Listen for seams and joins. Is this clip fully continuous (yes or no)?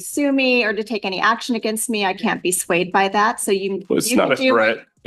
yes